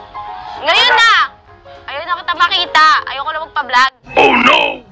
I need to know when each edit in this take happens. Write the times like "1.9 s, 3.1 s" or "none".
4.0 s